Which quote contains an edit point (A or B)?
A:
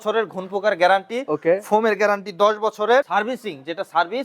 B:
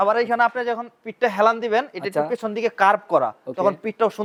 A